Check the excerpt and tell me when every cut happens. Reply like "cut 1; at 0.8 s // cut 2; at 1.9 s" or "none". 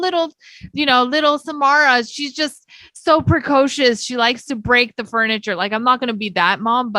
none